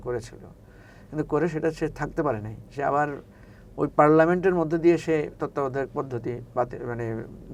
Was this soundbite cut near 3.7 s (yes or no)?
no